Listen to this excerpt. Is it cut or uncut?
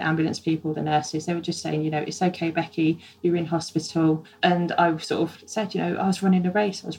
cut